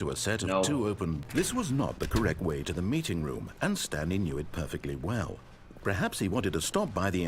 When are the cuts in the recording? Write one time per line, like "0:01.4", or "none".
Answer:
0:01.2